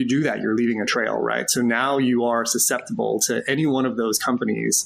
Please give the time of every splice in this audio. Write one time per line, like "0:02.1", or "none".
none